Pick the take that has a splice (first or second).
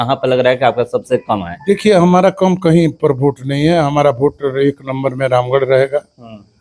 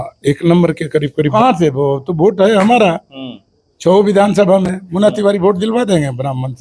second